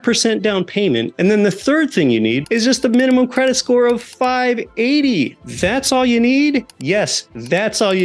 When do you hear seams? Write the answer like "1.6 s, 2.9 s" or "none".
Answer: 1.1 s, 2.4 s, 5.4 s, 6.7 s